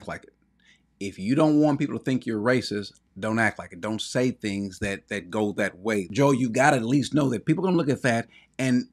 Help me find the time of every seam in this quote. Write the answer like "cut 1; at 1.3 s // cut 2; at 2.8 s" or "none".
cut 1; at 6.1 s